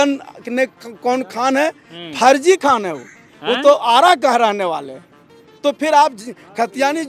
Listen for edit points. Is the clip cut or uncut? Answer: uncut